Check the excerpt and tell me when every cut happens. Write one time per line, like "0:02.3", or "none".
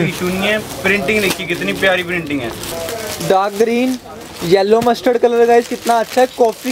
0:02.8